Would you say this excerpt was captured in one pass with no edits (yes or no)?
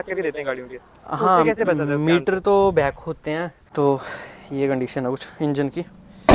no